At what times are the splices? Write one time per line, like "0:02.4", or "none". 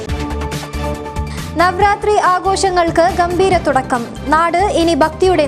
0:01.2